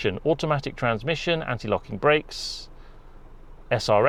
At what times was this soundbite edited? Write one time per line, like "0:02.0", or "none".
none